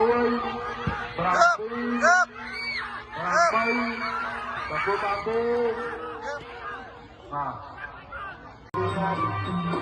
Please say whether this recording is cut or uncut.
cut